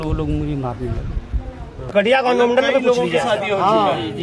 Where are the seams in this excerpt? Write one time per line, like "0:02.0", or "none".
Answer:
0:01.9